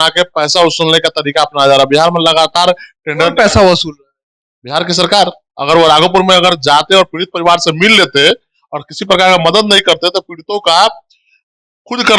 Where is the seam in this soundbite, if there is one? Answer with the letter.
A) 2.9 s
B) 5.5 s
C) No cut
B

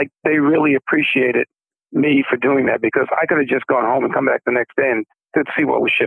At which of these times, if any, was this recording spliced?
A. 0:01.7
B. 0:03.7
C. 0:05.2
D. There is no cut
C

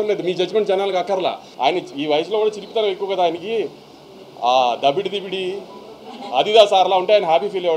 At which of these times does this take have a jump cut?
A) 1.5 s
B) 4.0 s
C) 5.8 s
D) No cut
A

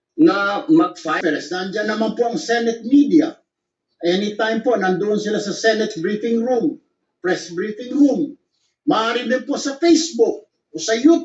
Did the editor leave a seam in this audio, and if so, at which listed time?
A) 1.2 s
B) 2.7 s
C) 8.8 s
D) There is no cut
A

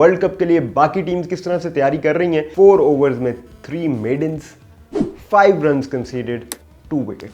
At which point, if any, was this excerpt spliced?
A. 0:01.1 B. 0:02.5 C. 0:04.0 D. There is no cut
B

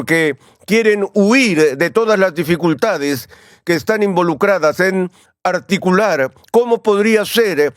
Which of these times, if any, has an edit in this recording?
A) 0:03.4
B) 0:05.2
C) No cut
B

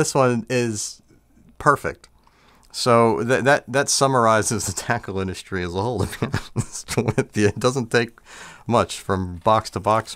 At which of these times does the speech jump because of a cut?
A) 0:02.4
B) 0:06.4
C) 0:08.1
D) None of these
D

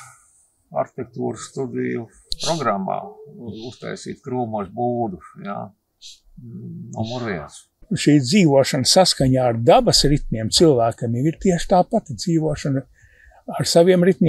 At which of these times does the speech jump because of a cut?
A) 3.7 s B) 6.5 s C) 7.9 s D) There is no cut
C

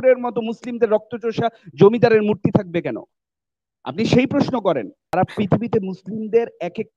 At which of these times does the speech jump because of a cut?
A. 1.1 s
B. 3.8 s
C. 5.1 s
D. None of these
C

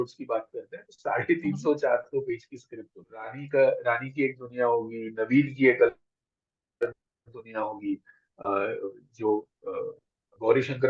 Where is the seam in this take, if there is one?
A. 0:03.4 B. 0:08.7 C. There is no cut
A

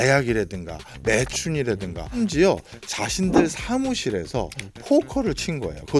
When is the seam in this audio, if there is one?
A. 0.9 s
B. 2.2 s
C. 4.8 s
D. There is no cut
B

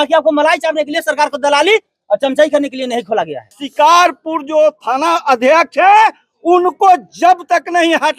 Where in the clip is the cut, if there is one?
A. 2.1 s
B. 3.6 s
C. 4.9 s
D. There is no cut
B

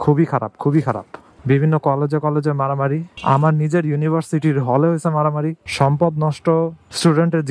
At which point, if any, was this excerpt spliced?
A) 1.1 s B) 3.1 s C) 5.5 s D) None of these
C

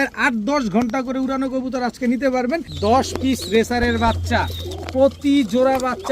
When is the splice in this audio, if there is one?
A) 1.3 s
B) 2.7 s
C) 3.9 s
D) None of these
B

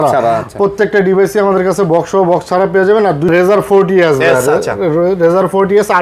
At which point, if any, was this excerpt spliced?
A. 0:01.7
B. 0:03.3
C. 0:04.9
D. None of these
B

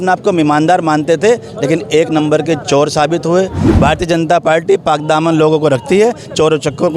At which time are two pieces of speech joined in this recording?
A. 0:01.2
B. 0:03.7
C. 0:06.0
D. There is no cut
B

